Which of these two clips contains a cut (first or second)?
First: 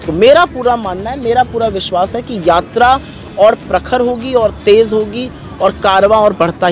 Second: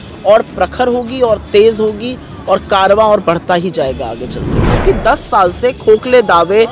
second